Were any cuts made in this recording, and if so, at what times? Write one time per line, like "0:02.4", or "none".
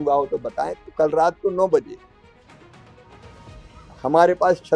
0:02.1
0:03.6